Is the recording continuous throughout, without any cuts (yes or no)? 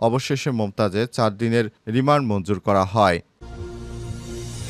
no